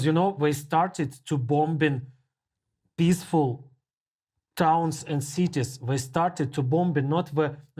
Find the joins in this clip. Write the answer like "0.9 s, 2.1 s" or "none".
none